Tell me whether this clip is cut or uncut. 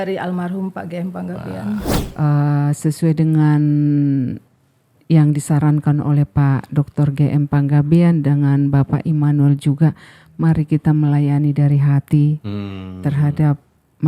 cut